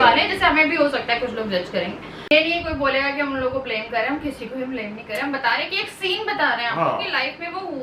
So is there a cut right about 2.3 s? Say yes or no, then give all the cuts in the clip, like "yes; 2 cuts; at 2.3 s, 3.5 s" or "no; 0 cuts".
yes; 1 cut; at 2.3 s